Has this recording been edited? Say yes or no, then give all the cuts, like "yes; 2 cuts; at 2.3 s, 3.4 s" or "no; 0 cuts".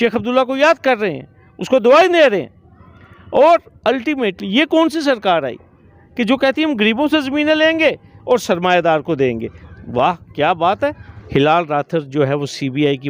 yes; 1 cut; at 11.1 s